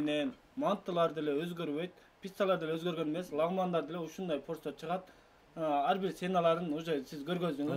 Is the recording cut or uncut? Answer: uncut